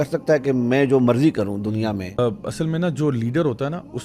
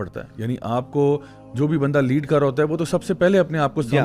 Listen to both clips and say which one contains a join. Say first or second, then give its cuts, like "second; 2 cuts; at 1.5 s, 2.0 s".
first; 1 cut; at 2.1 s